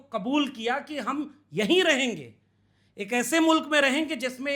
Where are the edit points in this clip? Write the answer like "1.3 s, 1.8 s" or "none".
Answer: none